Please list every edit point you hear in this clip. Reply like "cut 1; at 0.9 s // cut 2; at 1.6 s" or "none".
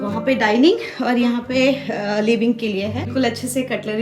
cut 1; at 3.1 s